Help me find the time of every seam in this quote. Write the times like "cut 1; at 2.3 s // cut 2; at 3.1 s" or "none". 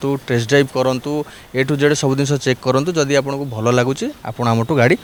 none